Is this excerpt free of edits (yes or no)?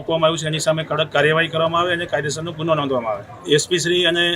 no